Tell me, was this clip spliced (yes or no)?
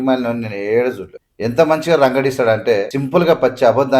yes